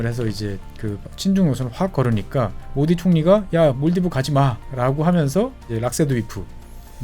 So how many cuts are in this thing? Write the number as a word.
three